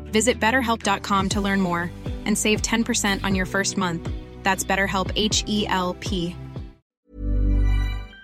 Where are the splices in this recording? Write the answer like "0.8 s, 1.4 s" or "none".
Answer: 7.0 s